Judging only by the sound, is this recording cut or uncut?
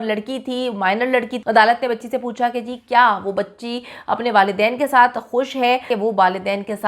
cut